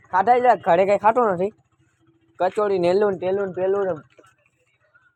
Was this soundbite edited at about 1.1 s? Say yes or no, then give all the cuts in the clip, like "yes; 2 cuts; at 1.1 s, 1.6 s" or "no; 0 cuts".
no; 0 cuts